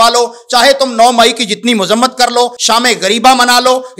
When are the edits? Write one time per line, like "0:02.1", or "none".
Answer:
0:02.6